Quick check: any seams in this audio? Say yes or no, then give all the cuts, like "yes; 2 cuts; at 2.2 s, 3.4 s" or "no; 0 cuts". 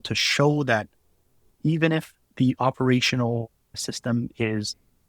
yes; 2 cuts; at 2.2 s, 3.8 s